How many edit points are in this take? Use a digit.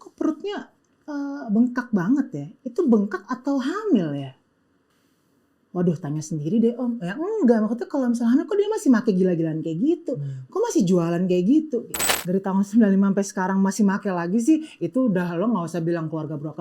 1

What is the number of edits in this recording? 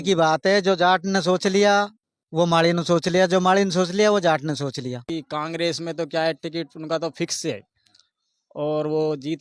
1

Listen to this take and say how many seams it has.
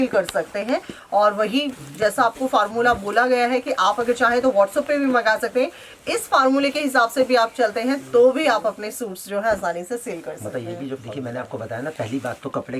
1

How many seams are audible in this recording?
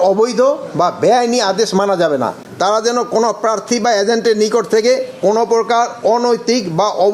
1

